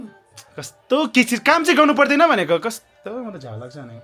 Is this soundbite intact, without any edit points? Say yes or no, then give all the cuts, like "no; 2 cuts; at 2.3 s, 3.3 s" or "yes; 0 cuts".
yes; 0 cuts